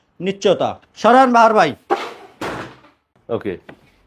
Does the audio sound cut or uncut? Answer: cut